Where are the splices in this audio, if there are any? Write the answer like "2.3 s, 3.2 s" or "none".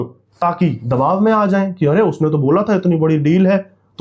none